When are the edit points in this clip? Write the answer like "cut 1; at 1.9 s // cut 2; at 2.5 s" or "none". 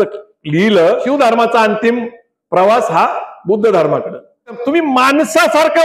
cut 1; at 1.0 s // cut 2; at 4.6 s